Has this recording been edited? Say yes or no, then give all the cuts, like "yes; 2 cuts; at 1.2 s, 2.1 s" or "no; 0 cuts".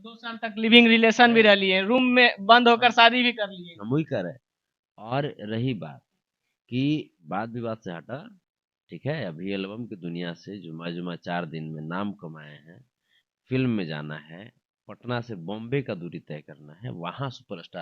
yes; 1 cut; at 7.2 s